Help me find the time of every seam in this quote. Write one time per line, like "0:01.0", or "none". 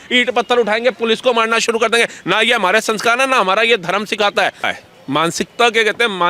0:04.7